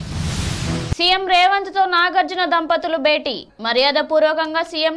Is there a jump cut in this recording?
yes; 1 cut; at 0.9 s

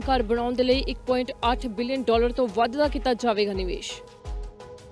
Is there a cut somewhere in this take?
yes; 1 cut; at 3.8 s

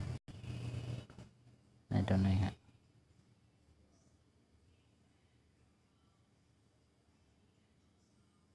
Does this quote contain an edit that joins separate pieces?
no; 0 cuts

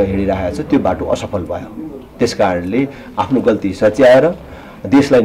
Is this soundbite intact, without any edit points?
yes; 0 cuts

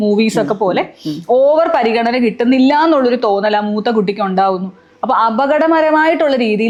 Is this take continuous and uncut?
yes; 0 cuts

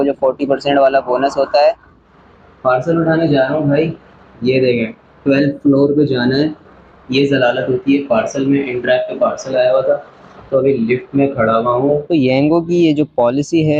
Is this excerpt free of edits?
no; 2 cuts; at 2.1 s, 12.1 s

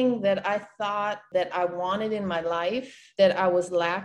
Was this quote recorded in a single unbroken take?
no; 2 cuts; at 1.2 s, 3.0 s

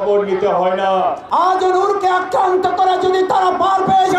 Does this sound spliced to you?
yes; 1 cut; at 1.2 s

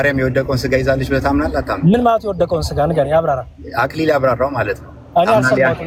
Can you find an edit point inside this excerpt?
no; 0 cuts

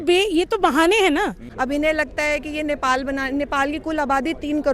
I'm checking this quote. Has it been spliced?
yes; 1 cut; at 1.4 s

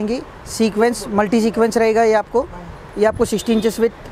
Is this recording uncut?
yes; 0 cuts

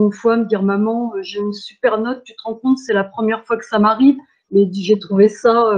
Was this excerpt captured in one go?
yes; 0 cuts

